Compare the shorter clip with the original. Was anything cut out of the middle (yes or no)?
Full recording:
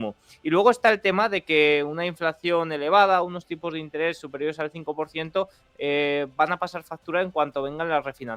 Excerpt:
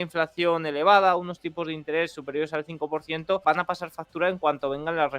yes